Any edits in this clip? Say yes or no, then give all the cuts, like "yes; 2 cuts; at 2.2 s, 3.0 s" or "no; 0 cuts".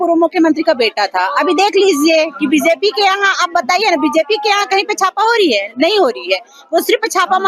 no; 0 cuts